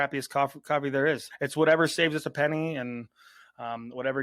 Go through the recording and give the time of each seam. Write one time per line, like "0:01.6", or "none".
0:01.3